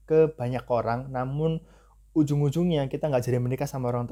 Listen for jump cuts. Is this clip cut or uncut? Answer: uncut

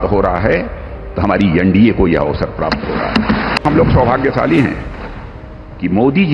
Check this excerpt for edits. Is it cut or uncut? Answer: cut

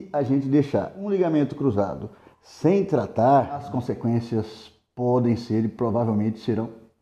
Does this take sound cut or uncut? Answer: cut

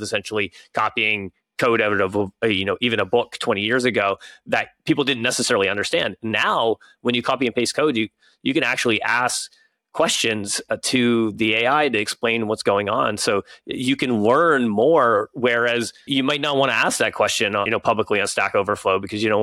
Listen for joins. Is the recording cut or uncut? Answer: cut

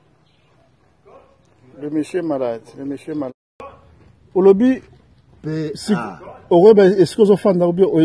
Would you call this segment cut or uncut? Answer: cut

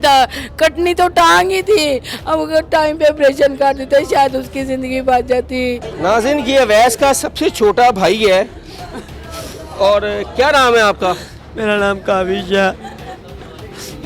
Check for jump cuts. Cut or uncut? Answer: cut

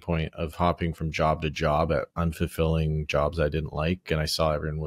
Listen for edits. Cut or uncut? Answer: uncut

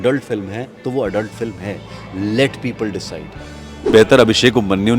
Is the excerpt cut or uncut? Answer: cut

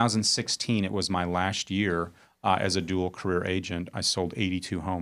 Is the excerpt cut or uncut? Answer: uncut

